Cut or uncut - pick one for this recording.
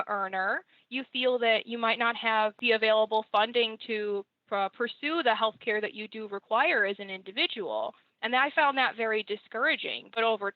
cut